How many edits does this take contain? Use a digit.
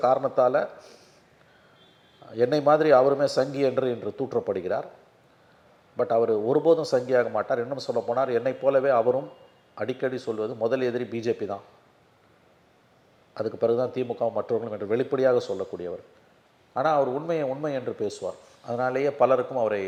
0